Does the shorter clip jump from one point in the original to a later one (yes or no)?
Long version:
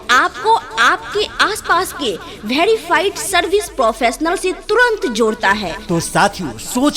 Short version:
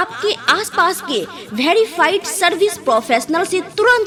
no